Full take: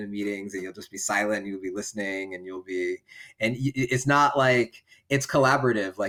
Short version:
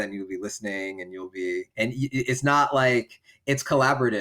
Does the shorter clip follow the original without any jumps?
no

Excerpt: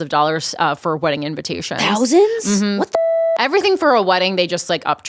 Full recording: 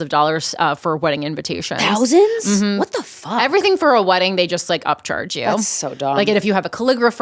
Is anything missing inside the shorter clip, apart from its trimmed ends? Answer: no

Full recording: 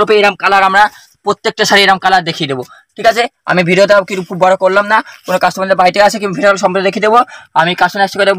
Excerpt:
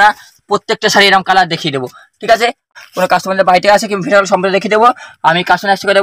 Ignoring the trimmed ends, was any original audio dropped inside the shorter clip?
yes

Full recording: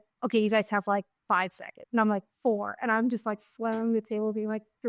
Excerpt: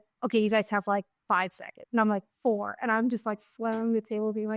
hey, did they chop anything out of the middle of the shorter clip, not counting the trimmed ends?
no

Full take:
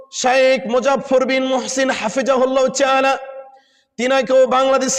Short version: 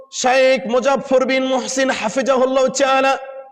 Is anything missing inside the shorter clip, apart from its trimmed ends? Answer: no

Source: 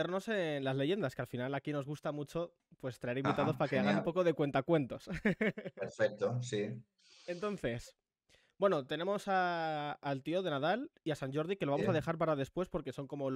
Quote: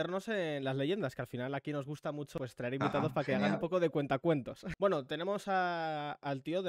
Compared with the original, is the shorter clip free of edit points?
no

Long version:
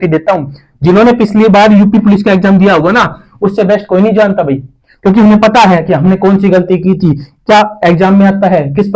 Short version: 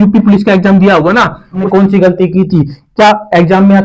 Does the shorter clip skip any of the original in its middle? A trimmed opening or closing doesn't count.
yes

